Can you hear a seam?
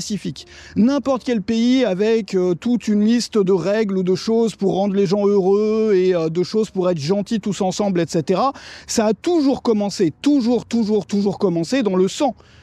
no; 0 cuts

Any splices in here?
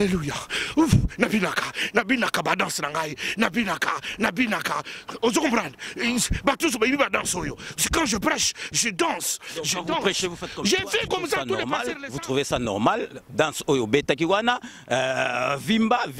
yes; 1 cut; at 11.7 s

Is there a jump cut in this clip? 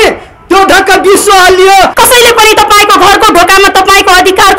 yes; 1 cut; at 1.9 s

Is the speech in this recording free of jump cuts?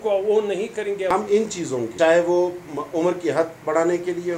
no; 2 cuts; at 1.1 s, 1.9 s

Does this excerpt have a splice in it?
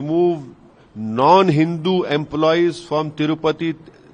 no; 0 cuts

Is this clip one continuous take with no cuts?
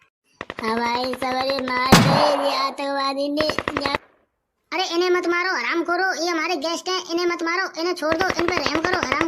no; 1 cut; at 4.0 s

